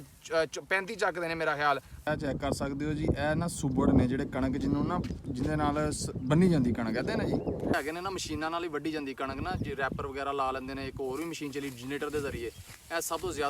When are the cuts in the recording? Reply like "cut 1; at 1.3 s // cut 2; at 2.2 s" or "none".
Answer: cut 1; at 2.1 s // cut 2; at 7.7 s